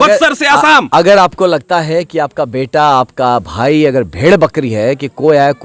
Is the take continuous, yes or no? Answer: yes